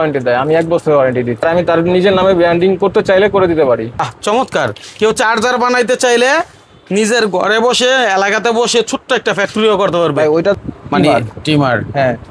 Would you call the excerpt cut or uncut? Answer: cut